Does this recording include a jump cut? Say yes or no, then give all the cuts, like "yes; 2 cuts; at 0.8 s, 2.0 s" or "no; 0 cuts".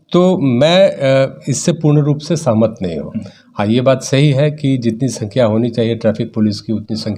no; 0 cuts